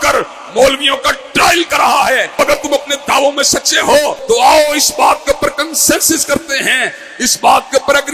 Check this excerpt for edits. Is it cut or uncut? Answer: cut